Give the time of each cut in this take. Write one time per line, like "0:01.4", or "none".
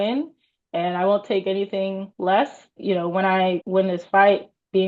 0:02.1
0:02.8
0:03.6

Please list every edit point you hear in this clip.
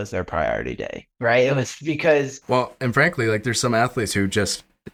none

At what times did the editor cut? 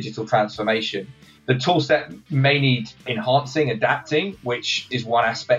0:01.1
0:03.0
0:04.8

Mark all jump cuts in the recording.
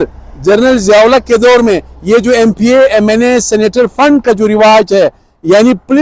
none

